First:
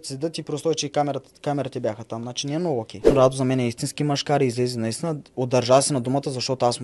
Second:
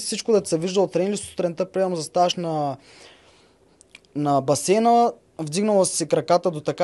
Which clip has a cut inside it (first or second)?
first